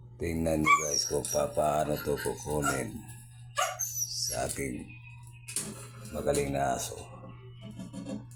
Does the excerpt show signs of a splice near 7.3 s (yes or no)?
no